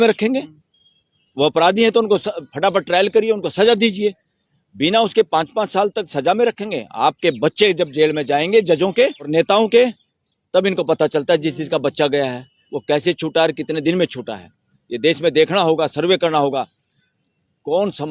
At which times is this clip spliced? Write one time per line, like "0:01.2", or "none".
0:09.3

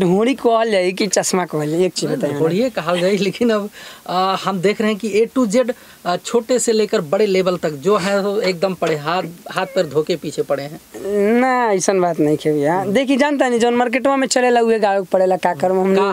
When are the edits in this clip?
none

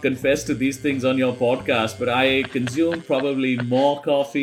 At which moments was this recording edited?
none

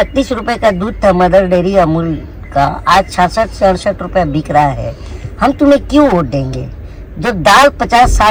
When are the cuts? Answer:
none

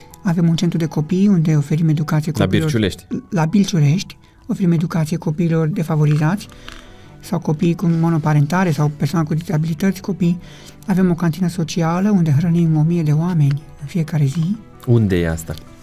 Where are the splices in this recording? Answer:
none

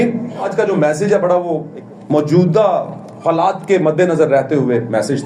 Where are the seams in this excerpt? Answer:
none

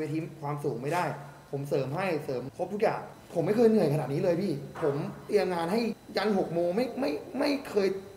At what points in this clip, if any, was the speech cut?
0:02.5
0:03.1
0:06.0

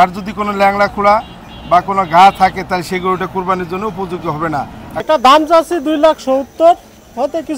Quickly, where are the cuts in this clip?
0:04.9

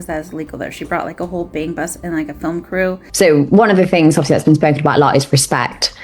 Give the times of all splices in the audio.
0:03.0

